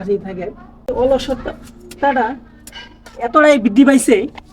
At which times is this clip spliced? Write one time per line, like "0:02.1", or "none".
0:00.9